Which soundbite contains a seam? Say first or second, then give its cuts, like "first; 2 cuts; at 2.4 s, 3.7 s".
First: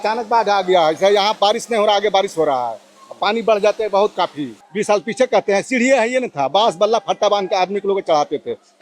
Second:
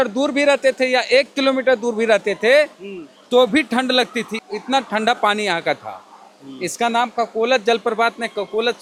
first; 1 cut; at 4.6 s